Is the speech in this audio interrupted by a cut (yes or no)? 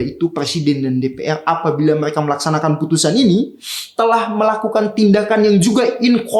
no